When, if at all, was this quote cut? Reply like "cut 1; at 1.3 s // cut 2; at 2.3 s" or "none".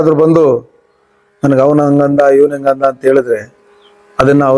none